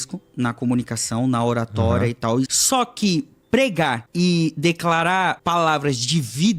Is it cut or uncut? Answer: cut